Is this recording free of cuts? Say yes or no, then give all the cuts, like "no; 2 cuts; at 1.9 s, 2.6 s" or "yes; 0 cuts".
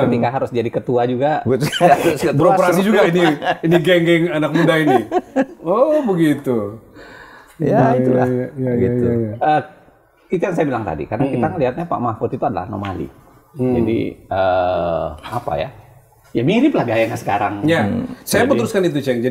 yes; 0 cuts